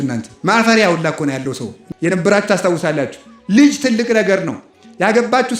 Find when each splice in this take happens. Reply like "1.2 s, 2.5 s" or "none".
1.8 s